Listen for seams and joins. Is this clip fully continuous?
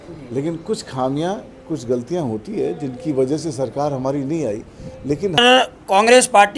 no; 1 cut; at 5.4 s

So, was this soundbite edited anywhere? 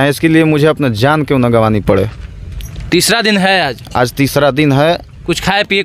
no; 0 cuts

